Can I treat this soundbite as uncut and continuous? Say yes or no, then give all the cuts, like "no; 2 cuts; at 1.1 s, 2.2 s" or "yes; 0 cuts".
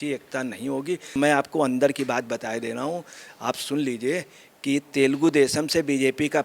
no; 1 cut; at 1.1 s